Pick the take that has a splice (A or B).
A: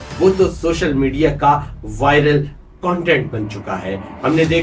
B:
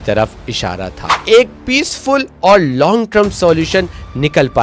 B